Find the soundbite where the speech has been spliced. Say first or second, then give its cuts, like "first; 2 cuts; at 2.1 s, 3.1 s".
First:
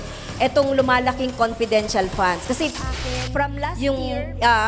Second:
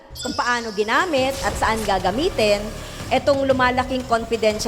first; 1 cut; at 3.2 s